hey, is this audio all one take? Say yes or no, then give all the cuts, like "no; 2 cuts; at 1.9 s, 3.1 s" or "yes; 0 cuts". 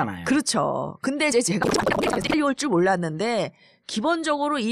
no; 1 cut; at 1.5 s